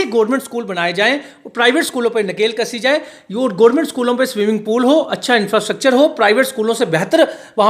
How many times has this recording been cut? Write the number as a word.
zero